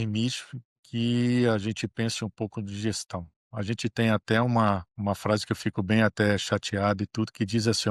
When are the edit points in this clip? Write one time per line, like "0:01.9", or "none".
0:04.9